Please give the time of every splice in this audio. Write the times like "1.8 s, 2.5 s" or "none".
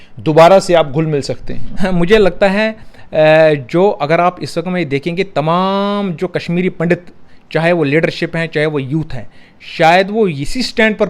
none